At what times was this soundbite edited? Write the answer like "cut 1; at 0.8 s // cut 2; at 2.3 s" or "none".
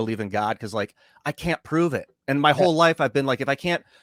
none